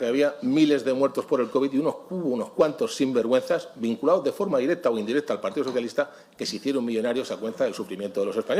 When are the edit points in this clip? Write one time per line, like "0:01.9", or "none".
none